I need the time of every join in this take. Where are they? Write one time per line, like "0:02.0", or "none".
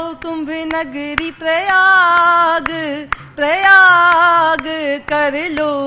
none